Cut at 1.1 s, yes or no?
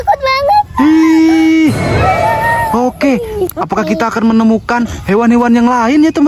no